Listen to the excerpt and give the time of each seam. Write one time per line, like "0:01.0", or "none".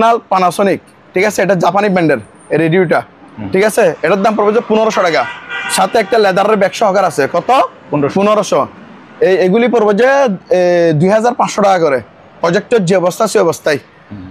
none